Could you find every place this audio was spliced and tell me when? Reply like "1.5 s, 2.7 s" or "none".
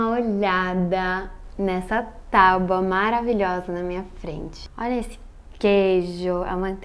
none